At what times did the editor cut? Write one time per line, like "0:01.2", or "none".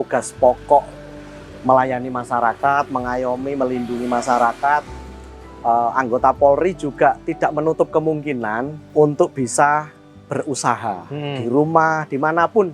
none